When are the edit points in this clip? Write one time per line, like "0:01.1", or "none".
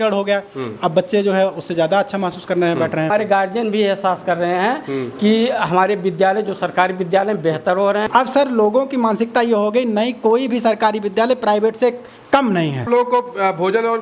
0:03.1
0:08.1
0:12.9